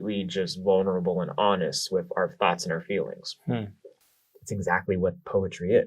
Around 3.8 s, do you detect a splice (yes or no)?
yes